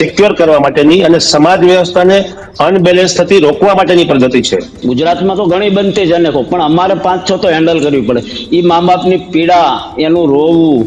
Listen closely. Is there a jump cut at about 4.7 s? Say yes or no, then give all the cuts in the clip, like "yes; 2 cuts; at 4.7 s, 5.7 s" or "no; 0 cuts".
yes; 1 cut; at 4.7 s